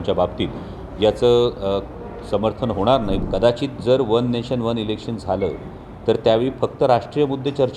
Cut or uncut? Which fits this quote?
cut